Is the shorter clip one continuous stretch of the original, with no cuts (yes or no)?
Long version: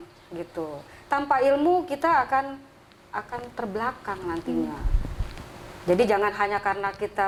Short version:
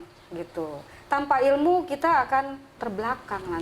no